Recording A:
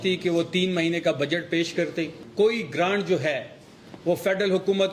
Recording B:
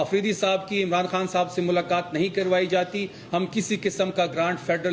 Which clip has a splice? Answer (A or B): A